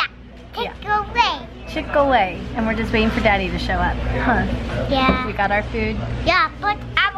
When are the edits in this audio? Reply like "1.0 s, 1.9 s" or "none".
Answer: none